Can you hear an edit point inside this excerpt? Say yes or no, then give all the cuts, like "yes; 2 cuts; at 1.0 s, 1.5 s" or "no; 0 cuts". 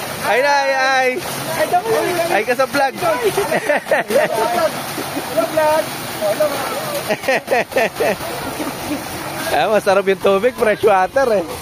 no; 0 cuts